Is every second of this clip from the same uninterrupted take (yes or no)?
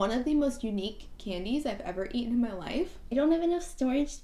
no